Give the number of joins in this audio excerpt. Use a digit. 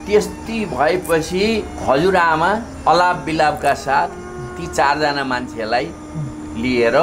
1